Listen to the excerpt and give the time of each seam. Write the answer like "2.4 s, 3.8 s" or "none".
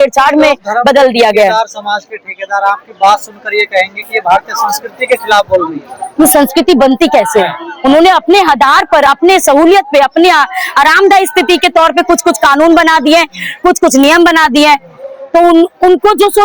none

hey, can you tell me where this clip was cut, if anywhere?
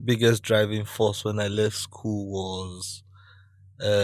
none

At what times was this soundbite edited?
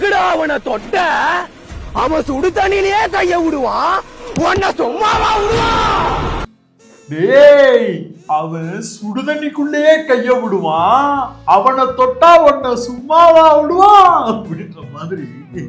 none

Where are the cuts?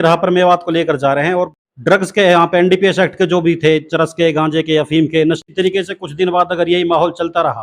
1.5 s, 5.4 s

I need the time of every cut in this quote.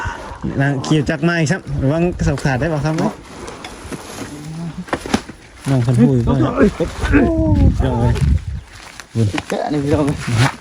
none

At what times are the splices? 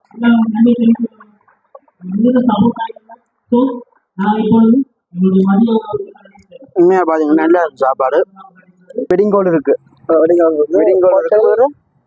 9.1 s

